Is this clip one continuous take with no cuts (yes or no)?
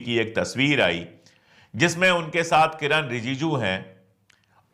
yes